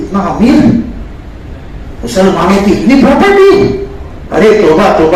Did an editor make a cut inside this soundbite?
no; 0 cuts

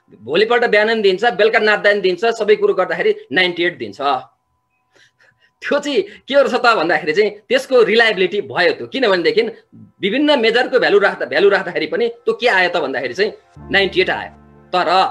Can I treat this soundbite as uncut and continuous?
yes; 0 cuts

